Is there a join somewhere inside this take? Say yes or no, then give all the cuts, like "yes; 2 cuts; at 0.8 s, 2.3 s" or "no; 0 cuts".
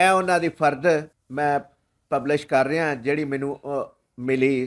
yes; 1 cut; at 1.2 s